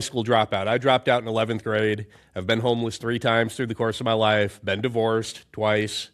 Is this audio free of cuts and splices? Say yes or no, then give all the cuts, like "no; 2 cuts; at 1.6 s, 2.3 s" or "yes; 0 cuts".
yes; 0 cuts